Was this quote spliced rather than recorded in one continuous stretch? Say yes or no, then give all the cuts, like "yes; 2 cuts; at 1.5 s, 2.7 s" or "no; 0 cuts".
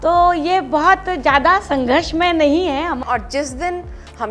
yes; 1 cut; at 3.0 s